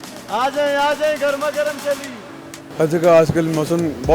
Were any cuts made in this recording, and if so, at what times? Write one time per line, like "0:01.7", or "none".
0:02.6